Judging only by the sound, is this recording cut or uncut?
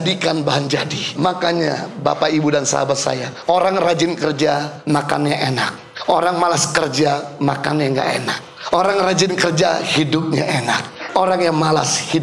cut